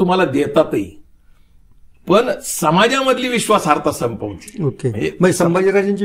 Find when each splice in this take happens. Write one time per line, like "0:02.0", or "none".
none